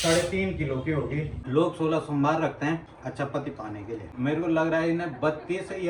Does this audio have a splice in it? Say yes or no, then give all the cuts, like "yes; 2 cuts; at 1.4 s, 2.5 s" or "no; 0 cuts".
yes; 3 cuts; at 1.3 s, 2.9 s, 4.1 s